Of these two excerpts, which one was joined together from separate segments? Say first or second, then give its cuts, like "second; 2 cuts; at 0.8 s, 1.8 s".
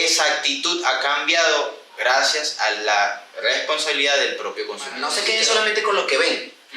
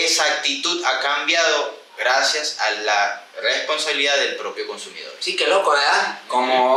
first; 1 cut; at 5.1 s